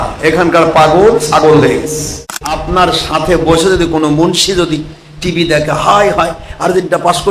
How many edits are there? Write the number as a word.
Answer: one